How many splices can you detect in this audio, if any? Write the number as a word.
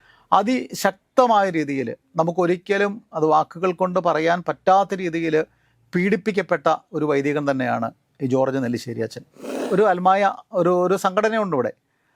one